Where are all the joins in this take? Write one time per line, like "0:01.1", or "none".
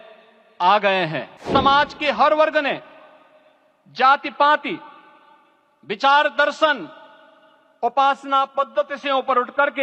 0:01.4

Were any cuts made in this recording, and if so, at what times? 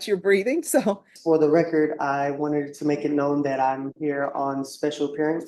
0:01.1

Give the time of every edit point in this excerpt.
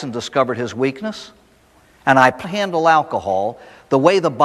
none

